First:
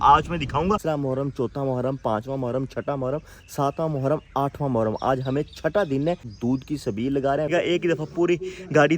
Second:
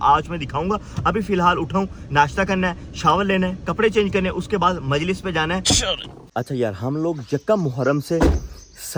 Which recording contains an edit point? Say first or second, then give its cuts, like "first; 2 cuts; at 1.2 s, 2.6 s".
first; 3 cuts; at 0.8 s, 6.3 s, 7.5 s